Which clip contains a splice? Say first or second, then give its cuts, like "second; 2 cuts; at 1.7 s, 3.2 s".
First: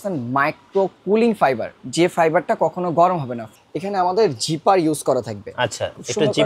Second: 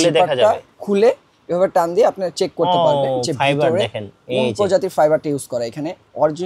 first; 1 cut; at 3.4 s